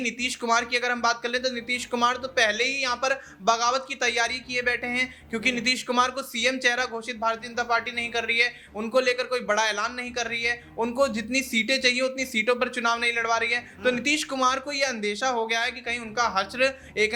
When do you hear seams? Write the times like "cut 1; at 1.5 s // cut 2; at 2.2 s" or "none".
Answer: none